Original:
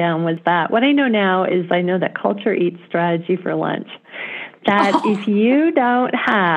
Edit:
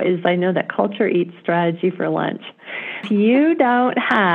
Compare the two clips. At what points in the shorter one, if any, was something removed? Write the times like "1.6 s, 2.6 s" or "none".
3.0 s